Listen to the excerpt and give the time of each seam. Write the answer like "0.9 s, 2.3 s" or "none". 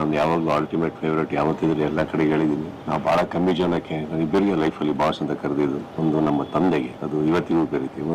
2.7 s, 5.9 s, 7.0 s